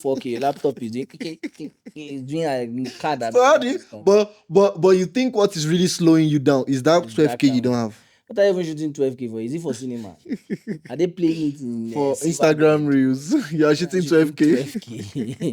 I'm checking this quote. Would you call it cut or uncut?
uncut